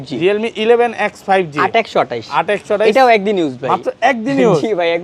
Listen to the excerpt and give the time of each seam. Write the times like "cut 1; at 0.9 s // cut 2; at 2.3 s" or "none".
none